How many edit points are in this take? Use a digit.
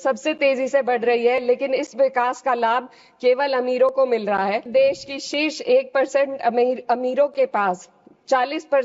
1